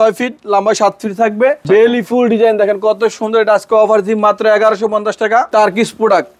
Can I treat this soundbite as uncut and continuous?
no; 2 cuts; at 1.6 s, 5.5 s

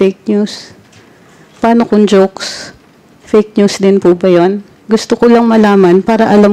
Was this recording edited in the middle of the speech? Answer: yes; 1 cut; at 4.7 s

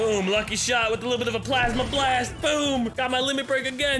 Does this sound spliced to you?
yes; 1 cut; at 2.9 s

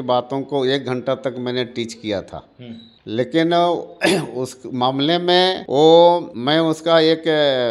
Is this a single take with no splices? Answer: yes; 0 cuts

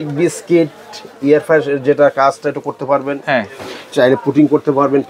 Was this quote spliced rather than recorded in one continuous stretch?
no; 0 cuts

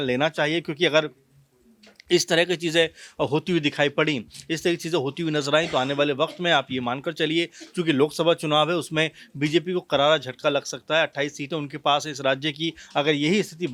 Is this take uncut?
yes; 0 cuts

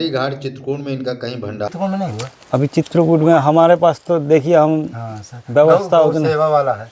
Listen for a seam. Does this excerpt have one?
yes; 1 cut; at 1.7 s

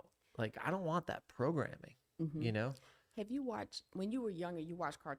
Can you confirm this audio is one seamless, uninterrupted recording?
yes; 0 cuts

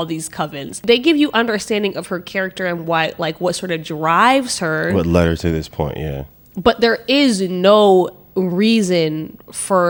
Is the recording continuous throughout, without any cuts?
yes; 0 cuts

